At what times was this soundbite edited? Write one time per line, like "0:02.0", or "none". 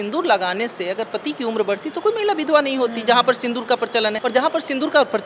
0:04.2